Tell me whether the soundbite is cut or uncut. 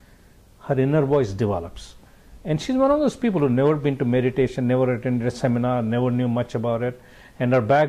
uncut